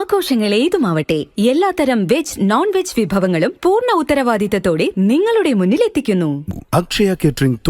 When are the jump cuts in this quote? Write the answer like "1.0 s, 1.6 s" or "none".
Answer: 6.4 s